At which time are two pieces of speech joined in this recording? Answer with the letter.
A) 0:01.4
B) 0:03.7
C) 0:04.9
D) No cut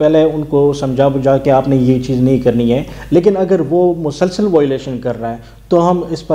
A